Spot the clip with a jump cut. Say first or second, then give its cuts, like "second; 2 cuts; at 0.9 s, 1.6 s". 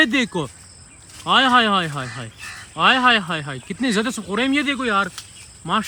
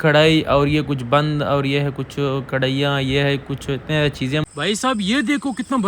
second; 1 cut; at 4.5 s